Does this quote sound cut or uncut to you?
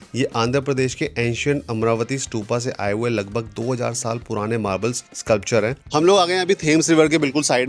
cut